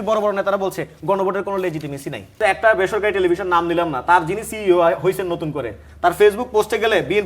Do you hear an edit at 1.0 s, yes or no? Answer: no